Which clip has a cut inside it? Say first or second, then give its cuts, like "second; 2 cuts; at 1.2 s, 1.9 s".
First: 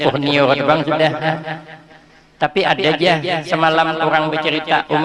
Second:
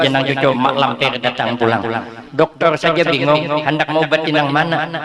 second; 1 cut; at 2.1 s